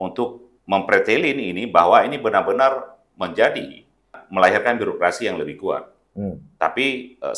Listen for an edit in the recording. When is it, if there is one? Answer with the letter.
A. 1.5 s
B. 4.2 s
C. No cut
B